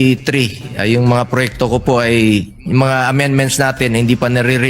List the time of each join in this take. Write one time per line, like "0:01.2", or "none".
0:02.0